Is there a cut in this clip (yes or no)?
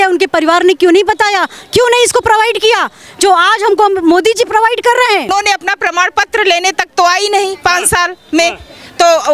yes